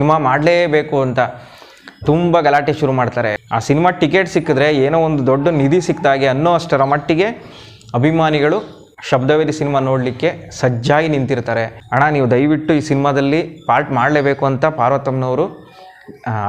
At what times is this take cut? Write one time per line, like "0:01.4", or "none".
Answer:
0:03.4
0:11.8

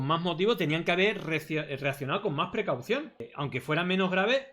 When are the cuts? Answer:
none

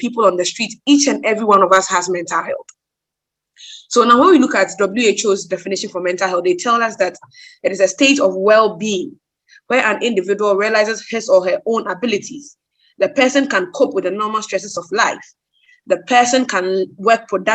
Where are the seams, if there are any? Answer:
none

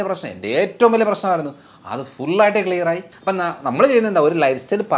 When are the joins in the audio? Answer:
0:03.1

